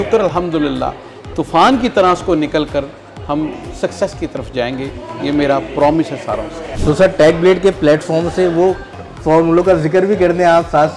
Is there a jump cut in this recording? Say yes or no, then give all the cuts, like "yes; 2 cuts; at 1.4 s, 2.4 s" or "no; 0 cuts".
no; 0 cuts